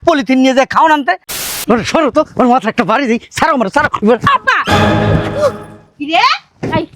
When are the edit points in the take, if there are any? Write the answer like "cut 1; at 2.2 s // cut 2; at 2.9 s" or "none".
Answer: cut 1; at 1.3 s